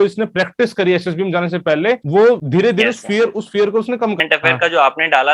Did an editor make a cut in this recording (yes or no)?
yes